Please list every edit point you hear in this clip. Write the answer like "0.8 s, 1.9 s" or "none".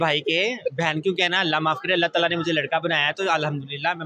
none